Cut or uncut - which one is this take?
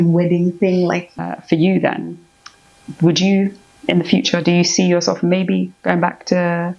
cut